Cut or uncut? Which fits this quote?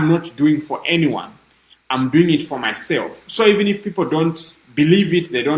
uncut